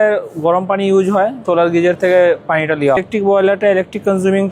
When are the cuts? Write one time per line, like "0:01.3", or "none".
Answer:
0:01.4
0:03.0